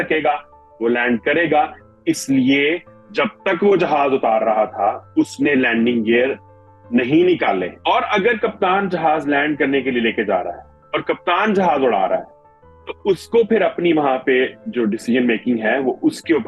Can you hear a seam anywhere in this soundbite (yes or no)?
yes